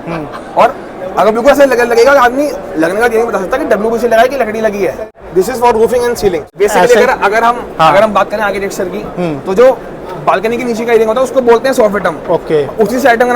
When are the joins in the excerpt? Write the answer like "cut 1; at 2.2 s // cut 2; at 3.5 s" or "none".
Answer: cut 1; at 5.0 s // cut 2; at 6.6 s